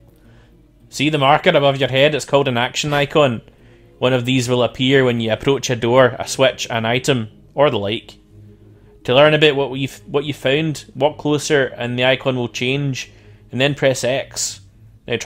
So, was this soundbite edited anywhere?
yes; 1 cut; at 0.9 s

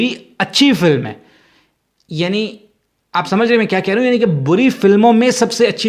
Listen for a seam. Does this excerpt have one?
no; 0 cuts

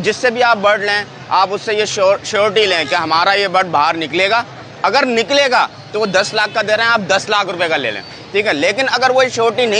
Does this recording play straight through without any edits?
yes; 0 cuts

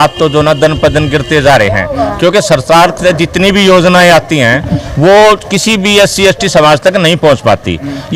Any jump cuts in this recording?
no; 0 cuts

